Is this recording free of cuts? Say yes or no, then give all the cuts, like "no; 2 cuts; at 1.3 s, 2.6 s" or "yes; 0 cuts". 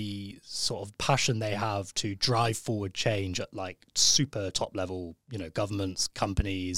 yes; 0 cuts